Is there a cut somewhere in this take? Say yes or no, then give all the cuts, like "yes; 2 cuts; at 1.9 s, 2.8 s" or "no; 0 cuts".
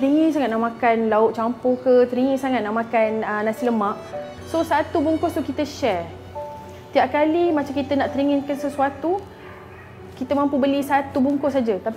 yes; 1 cut; at 4.3 s